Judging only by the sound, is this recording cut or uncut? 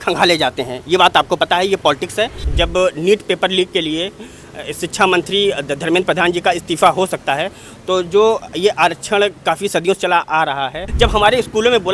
cut